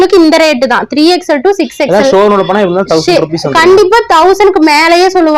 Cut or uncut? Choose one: uncut